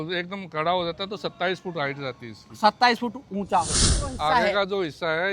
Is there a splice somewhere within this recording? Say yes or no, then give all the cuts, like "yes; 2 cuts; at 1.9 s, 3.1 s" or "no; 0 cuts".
yes; 1 cut; at 4.1 s